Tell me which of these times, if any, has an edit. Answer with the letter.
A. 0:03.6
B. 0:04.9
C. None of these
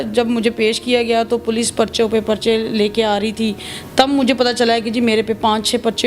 C